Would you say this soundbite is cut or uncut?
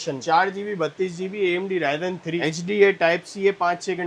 cut